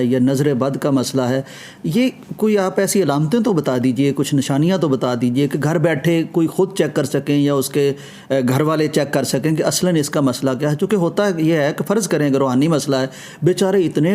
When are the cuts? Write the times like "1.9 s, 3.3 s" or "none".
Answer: none